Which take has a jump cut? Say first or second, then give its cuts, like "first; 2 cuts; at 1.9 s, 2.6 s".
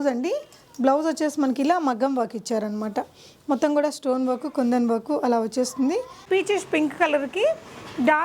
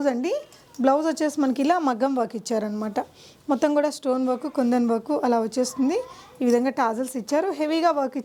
first; 1 cut; at 6.2 s